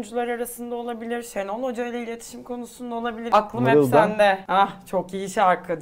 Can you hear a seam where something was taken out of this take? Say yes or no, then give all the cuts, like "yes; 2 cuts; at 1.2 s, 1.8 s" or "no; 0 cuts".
yes; 2 cuts; at 3.2 s, 4.4 s